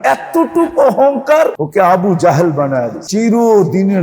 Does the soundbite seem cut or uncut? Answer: cut